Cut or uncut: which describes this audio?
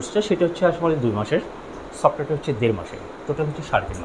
uncut